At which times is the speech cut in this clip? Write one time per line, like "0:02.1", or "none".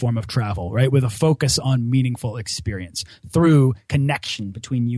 none